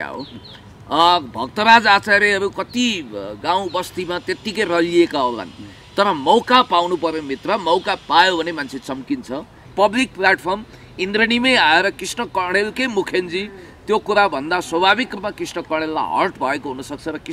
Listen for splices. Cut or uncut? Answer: cut